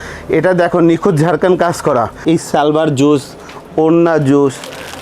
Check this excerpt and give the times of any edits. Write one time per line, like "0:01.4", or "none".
0:02.2